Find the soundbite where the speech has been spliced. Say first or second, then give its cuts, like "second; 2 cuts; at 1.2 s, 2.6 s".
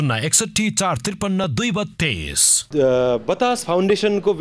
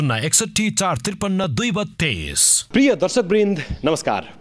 first; 1 cut; at 2.5 s